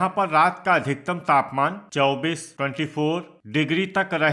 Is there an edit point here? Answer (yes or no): no